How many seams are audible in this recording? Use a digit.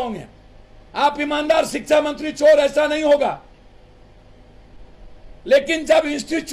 0